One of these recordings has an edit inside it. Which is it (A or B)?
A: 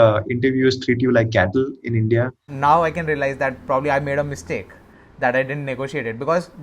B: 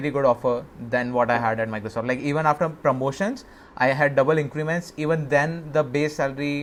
A